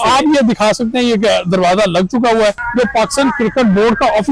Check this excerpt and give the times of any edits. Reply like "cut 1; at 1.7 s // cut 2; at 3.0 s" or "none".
cut 1; at 2.6 s